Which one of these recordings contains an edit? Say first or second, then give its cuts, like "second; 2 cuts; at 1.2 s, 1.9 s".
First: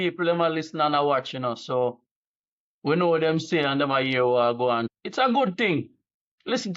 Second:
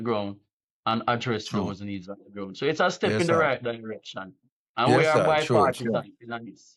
first; 1 cut; at 4.9 s